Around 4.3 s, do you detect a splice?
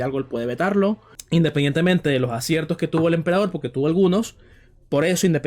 no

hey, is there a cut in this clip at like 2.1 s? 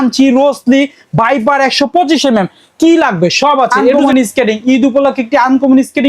no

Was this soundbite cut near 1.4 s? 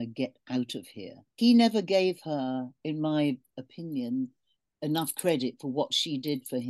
yes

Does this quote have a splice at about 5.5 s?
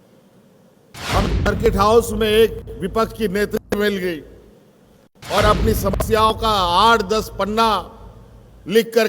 no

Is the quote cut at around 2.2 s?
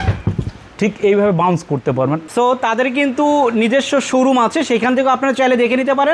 yes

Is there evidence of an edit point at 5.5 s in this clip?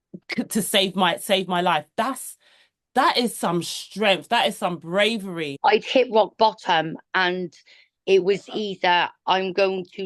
yes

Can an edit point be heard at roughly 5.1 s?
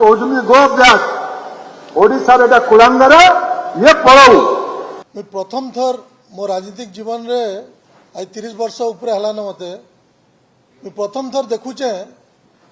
yes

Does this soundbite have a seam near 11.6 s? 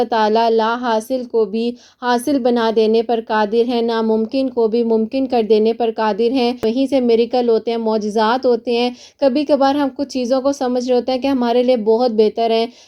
no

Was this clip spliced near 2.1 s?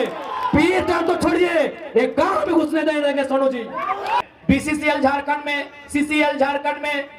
no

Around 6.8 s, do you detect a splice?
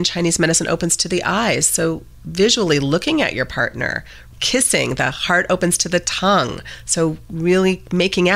no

